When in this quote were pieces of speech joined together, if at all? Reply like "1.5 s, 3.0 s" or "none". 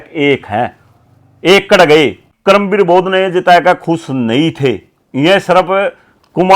2.3 s